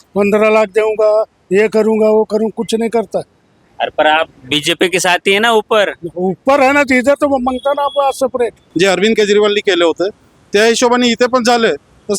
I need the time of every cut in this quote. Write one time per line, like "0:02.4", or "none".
0:08.6